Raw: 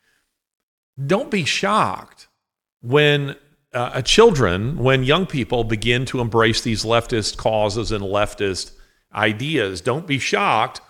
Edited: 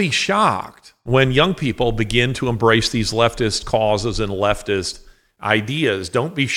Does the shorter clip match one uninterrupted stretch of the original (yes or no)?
no